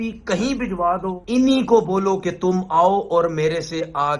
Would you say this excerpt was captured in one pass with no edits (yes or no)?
no